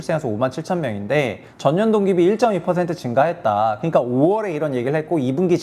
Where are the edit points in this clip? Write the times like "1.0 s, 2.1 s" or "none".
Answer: 1.4 s